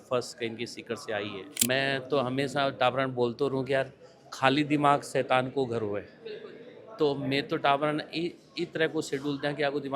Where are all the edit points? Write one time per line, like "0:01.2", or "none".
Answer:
0:01.6